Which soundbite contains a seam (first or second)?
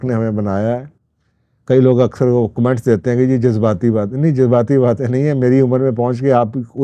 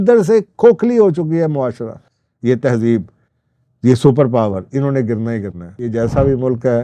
second